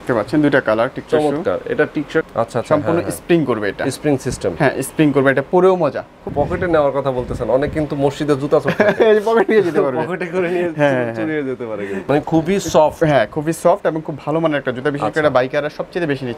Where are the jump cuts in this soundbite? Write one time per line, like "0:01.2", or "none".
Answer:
0:02.3
0:06.3
0:12.0